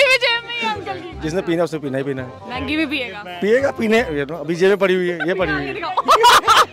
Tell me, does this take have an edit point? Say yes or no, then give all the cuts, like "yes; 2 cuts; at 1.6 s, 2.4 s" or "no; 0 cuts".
yes; 1 cut; at 1.1 s